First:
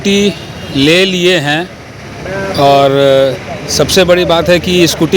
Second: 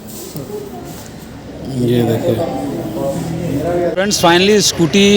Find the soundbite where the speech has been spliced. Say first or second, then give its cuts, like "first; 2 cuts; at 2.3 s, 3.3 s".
second; 1 cut; at 3.9 s